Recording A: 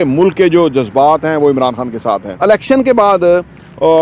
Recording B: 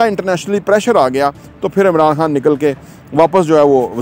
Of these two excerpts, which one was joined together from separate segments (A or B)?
A